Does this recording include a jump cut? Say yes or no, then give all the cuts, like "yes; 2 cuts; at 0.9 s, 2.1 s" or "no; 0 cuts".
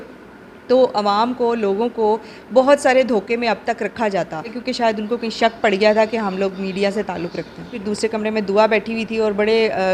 yes; 2 cuts; at 4.5 s, 7.8 s